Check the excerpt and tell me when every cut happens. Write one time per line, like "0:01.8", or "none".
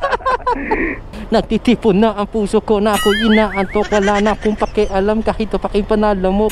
0:01.0